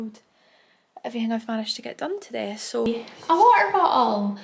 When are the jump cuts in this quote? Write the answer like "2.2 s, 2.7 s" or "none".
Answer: 2.9 s